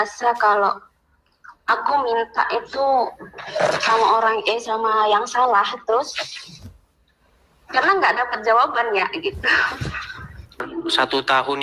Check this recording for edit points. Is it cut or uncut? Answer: cut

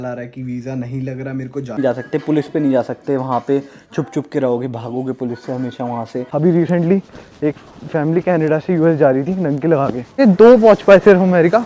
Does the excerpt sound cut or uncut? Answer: cut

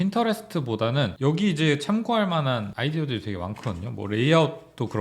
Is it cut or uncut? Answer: cut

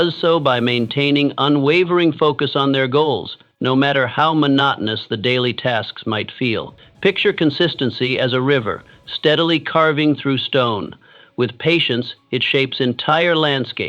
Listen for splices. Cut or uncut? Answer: cut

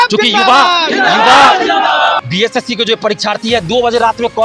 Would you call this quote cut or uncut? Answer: cut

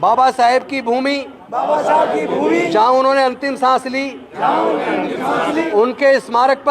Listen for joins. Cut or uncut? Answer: cut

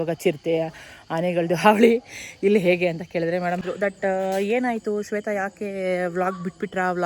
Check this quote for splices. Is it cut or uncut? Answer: cut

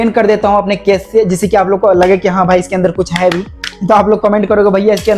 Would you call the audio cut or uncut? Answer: uncut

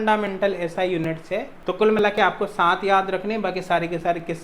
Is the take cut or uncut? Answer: cut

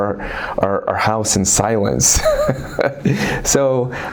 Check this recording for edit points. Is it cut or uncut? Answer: uncut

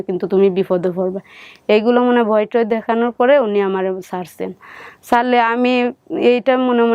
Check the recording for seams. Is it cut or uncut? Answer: uncut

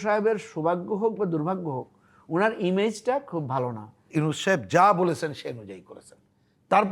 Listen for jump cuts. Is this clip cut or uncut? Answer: cut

